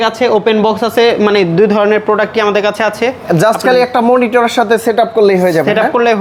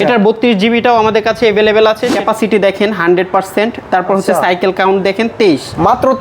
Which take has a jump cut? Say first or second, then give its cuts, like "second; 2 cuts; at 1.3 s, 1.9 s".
second; 1 cut; at 2.1 s